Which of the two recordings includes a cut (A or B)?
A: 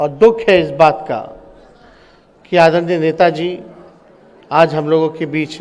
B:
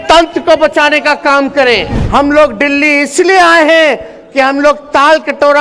B